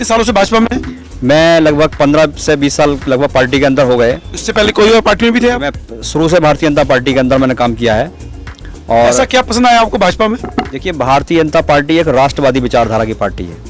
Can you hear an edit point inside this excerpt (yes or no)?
no